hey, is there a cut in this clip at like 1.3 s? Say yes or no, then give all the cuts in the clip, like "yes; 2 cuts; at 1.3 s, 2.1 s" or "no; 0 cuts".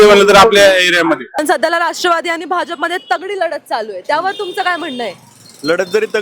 yes; 1 cut; at 1.3 s